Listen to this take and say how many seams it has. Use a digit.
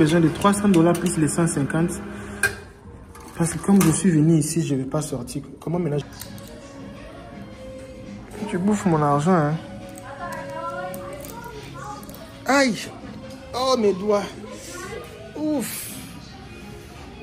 1